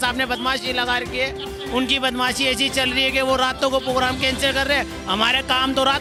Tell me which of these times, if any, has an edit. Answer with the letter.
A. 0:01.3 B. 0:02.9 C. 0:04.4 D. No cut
D